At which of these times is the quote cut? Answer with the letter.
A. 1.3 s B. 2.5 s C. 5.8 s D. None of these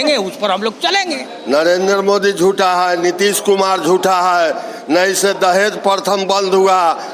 A